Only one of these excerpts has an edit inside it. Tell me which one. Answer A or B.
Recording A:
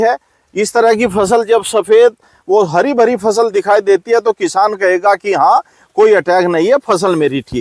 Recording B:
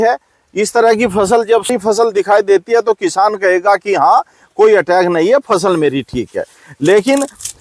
B